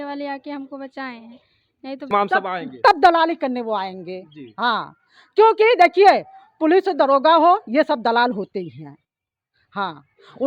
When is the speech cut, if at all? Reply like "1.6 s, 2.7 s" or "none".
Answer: 2.1 s